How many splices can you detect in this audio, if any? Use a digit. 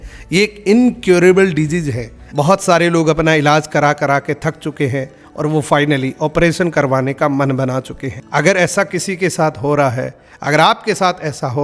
1